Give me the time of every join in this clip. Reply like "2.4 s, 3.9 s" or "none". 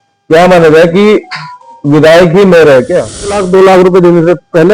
3.4 s